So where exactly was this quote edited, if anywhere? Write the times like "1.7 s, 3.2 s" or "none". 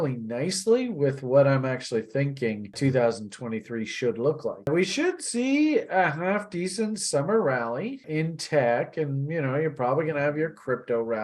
2.8 s, 8.0 s